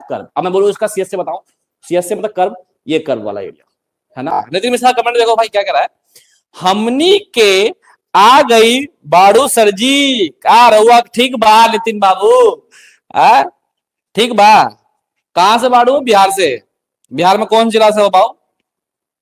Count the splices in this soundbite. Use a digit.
1